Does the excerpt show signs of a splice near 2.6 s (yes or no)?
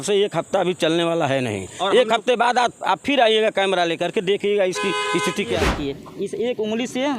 no